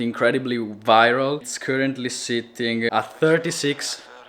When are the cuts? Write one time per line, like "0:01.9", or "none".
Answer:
0:01.4
0:02.9